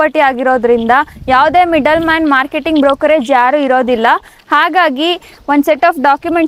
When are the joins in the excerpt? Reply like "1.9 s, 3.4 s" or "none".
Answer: none